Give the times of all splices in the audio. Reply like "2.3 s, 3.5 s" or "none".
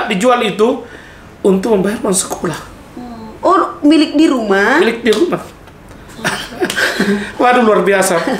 none